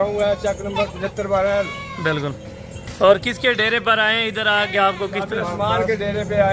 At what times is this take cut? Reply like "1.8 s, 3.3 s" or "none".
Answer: none